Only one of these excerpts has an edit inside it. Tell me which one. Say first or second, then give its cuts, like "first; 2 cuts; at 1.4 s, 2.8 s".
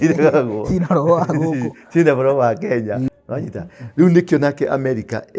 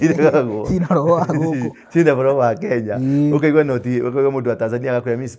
first; 1 cut; at 3.1 s